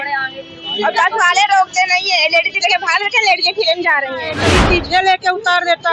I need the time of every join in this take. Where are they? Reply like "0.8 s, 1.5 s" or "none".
4.4 s